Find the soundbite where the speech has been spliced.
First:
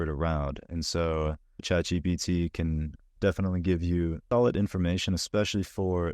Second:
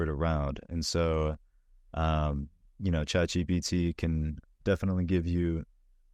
first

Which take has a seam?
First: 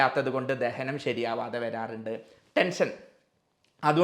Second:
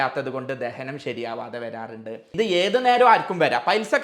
second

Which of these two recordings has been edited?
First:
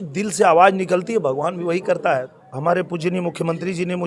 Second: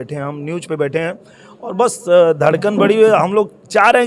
first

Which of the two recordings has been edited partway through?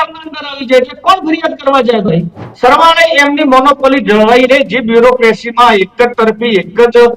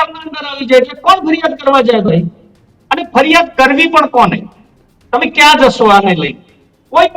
first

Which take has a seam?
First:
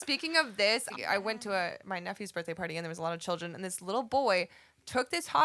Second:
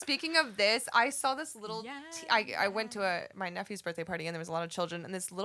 first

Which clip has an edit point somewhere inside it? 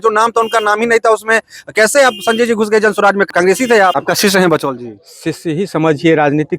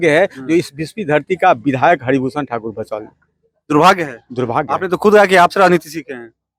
first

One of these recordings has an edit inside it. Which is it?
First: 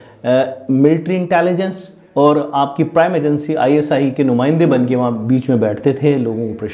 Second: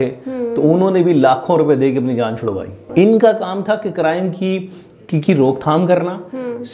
second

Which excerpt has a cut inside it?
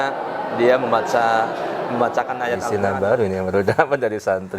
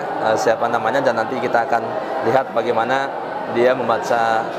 first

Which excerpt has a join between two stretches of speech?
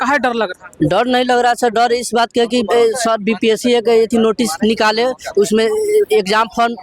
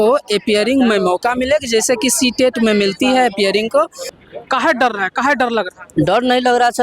second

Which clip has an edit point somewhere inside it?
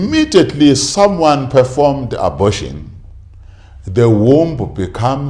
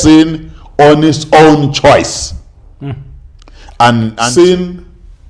second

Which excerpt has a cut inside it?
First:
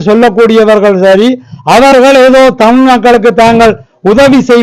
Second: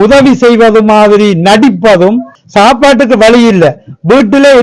second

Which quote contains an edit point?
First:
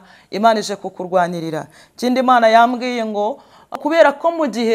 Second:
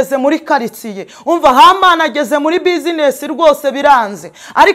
first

